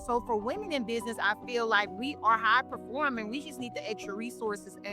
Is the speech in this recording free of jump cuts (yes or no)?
yes